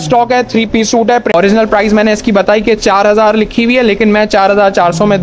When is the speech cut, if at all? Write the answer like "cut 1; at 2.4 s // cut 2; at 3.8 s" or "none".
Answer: cut 1; at 1.3 s